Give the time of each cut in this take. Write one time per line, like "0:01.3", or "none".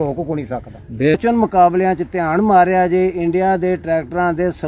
0:01.1

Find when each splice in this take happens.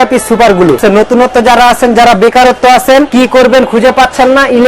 0:00.8
0:03.1

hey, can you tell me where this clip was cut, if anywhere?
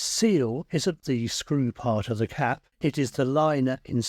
0:01.0
0:02.7

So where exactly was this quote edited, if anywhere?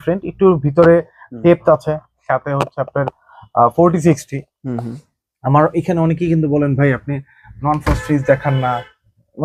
none

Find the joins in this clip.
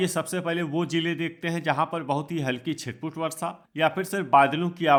none

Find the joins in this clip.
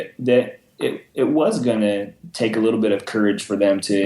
none

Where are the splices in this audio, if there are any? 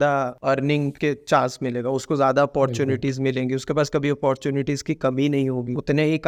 none

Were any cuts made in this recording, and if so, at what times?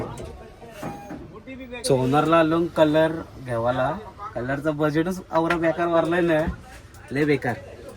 0:01.8

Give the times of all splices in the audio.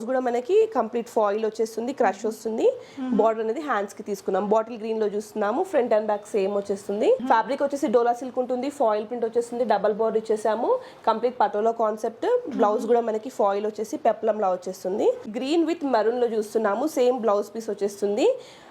0:07.2
0:15.2

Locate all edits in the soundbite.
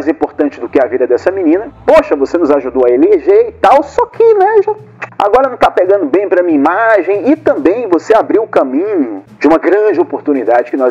0:01.7

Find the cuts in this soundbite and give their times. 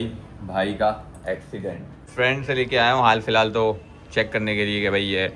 0:02.0

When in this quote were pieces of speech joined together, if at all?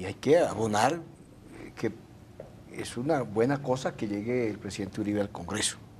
0:03.3

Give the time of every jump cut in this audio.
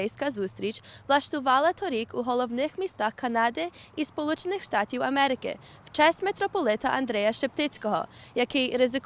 0:07.5

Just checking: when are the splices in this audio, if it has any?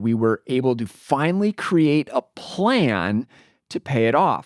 none

